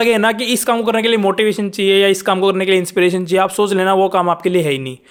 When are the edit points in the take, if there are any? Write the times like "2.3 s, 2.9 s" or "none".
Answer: none